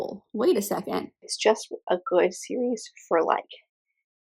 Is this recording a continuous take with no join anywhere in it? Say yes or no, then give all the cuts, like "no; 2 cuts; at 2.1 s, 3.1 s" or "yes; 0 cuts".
no; 1 cut; at 1.3 s